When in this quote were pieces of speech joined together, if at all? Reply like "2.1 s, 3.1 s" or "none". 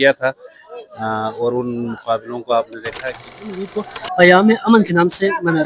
3.5 s